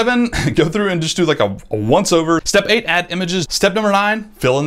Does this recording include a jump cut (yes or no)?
yes